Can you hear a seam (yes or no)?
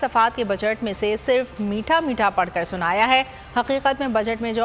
no